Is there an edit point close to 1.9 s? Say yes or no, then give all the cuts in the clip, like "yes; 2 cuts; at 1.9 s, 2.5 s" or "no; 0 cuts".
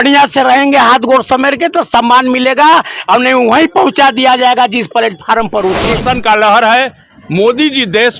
no; 1 cut; at 6.0 s